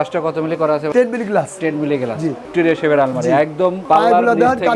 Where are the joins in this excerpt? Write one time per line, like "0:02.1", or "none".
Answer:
0:02.5
0:03.8